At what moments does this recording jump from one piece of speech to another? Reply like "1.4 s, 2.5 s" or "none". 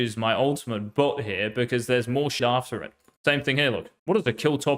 2.5 s, 3.9 s